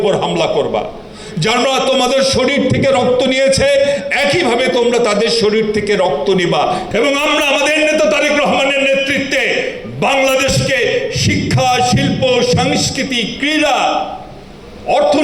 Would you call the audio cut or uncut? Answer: cut